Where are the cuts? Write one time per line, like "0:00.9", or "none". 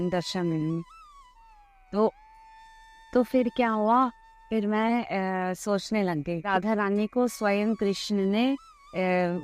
0:06.4